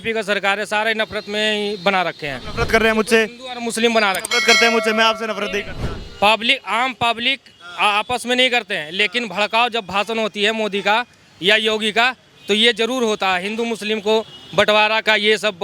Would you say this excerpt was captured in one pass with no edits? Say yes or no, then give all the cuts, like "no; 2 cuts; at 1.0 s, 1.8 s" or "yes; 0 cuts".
yes; 0 cuts